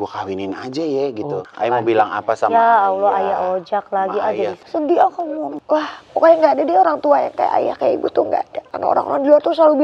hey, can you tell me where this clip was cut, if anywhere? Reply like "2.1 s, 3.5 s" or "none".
1.4 s, 4.6 s, 5.6 s, 8.6 s